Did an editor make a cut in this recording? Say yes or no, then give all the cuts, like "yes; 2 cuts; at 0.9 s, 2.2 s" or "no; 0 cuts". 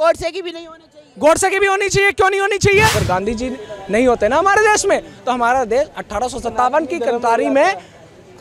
yes; 1 cut; at 3.0 s